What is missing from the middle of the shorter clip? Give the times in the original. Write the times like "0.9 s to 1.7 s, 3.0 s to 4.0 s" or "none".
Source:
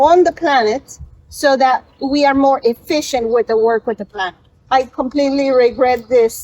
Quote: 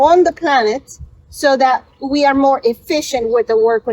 none